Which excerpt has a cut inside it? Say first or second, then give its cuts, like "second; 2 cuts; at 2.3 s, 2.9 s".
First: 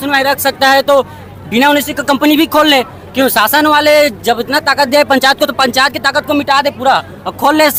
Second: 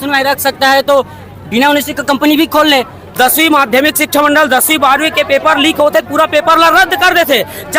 second; 1 cut; at 3.0 s